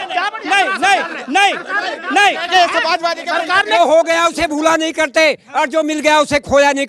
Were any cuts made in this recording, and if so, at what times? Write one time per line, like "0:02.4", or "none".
0:03.8